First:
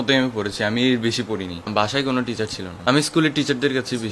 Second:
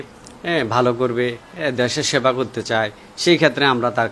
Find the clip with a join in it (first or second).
first